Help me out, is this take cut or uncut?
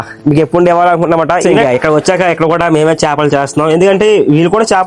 cut